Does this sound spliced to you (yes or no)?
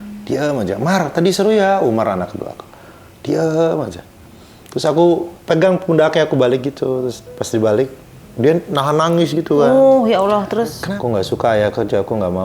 yes